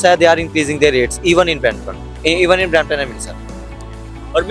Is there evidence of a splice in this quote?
no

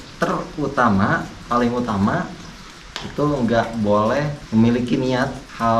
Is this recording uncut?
yes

